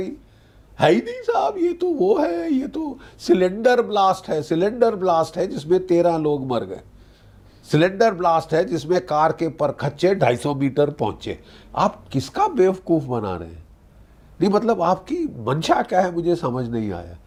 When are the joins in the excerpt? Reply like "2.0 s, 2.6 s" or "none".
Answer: none